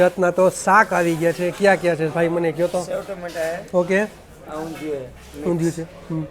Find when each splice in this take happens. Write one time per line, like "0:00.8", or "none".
none

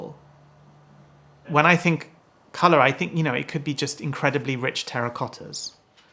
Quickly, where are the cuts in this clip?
0:01.5

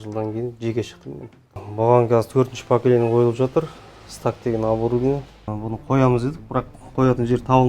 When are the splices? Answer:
0:01.6
0:05.5

